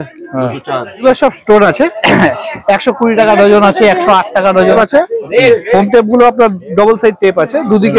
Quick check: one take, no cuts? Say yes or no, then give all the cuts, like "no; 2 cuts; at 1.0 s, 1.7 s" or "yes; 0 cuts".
no; 2 cuts; at 1.0 s, 4.8 s